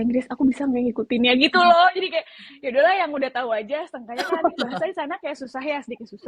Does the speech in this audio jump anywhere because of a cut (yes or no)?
no